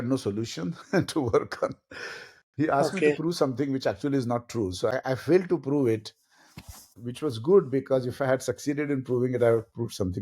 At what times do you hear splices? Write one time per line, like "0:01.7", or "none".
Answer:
0:04.9
0:06.9

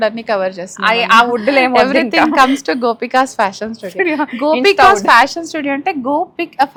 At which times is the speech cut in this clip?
none

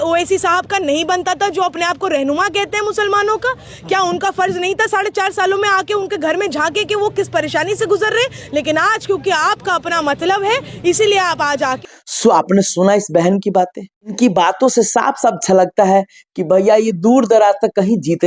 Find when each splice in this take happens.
none

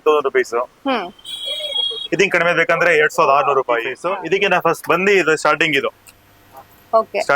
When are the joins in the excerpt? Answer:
0:03.9

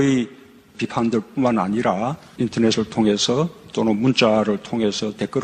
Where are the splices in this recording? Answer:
none

